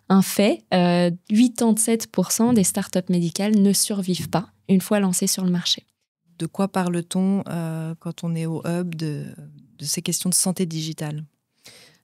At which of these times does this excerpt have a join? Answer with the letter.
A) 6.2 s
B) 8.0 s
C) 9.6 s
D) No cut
A